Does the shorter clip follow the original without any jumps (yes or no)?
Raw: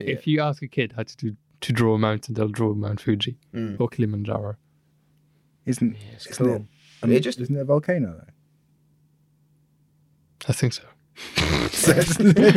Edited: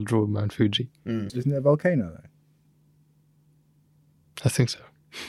no